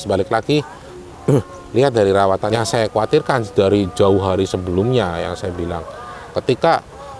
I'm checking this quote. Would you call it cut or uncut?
cut